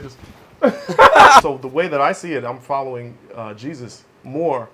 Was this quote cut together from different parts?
yes; 1 cut; at 1.4 s

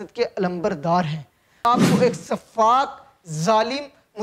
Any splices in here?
yes; 1 cut; at 1.6 s

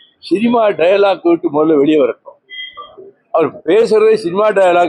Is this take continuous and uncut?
yes; 0 cuts

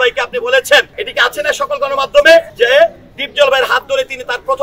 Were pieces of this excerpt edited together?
yes; 2 cuts; at 1.0 s, 2.5 s

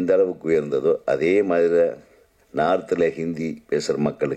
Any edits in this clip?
no; 0 cuts

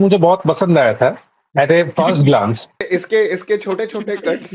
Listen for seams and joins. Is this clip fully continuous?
no; 1 cut; at 2.7 s

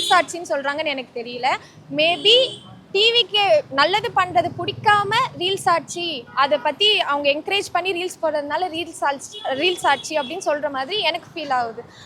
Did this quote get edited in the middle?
no; 0 cuts

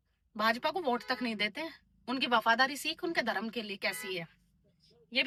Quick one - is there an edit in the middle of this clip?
no; 0 cuts

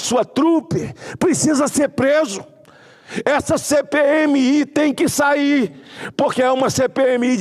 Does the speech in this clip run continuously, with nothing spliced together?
yes; 0 cuts

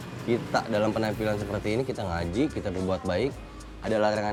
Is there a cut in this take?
no; 0 cuts

